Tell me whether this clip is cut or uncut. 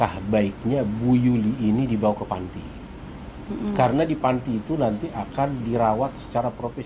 uncut